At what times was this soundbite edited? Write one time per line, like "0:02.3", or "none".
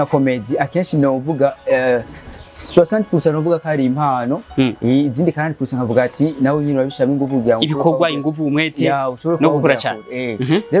none